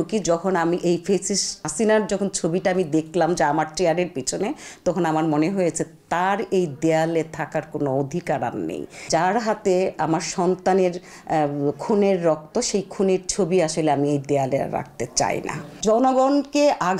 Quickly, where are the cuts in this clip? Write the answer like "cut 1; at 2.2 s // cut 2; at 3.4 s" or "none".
cut 1; at 1.6 s // cut 2; at 9.0 s // cut 3; at 15.8 s

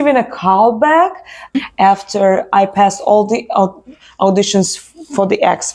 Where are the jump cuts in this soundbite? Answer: cut 1; at 1.6 s

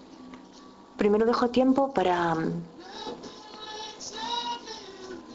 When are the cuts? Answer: cut 1; at 2.7 s

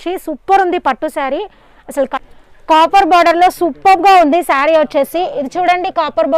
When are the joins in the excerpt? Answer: cut 1; at 2.2 s

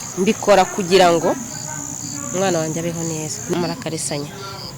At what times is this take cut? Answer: cut 1; at 3.4 s

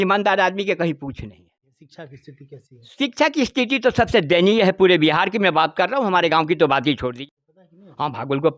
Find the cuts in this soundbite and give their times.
cut 1; at 1.7 s // cut 2; at 7.1 s

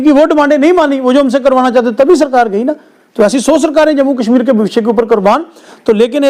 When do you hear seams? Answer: none

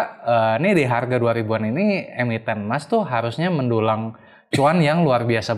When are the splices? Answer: none

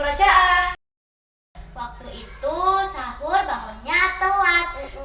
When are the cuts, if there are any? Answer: cut 1; at 1.4 s

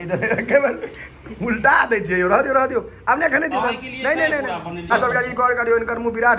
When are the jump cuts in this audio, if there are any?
cut 1; at 4.9 s

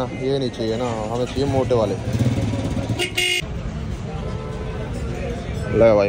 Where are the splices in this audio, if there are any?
none

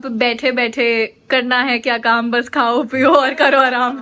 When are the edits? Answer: none

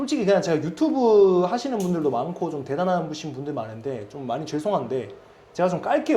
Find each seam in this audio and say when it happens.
none

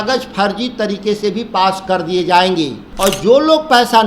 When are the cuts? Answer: cut 1; at 2.8 s

